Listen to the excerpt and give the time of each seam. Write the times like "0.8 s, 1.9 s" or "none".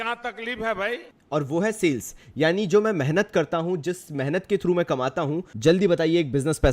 1.1 s, 5.5 s